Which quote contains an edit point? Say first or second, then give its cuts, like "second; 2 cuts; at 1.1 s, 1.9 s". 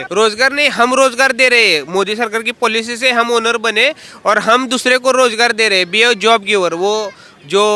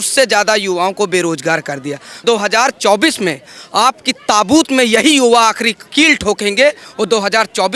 second; 1 cut; at 2.2 s